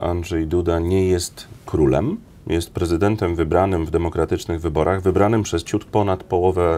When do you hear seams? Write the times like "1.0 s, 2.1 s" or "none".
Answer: none

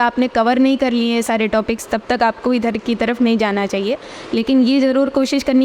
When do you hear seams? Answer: none

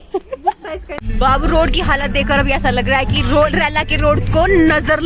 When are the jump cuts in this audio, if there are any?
1.0 s

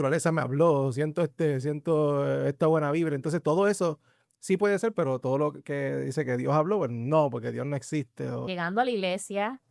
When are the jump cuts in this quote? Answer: 8.4 s

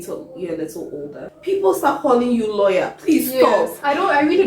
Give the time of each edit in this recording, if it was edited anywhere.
1.3 s

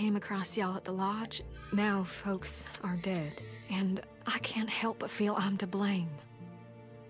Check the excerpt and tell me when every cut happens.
none

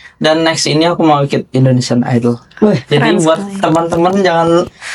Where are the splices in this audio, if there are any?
none

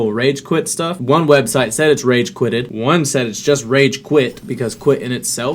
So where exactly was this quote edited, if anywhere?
1.0 s, 2.7 s, 4.4 s

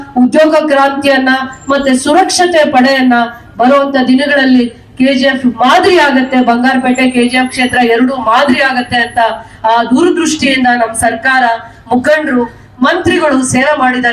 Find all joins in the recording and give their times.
none

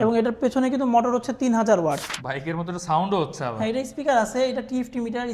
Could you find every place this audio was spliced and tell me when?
2.1 s

